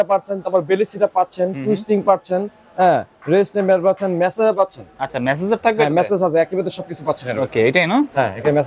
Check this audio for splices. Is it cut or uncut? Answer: uncut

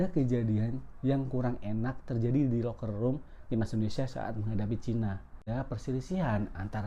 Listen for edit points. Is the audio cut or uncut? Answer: cut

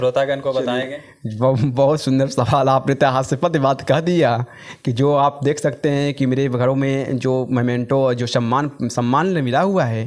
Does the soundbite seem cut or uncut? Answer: uncut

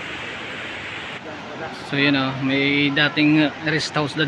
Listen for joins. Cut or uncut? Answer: cut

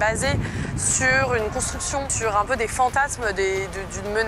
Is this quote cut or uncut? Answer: cut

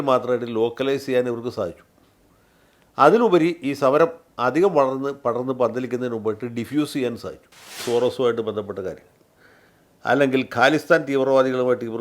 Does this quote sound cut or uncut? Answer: cut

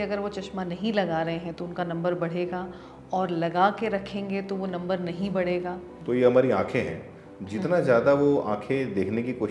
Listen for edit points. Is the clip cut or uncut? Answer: cut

